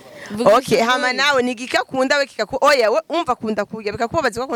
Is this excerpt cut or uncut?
uncut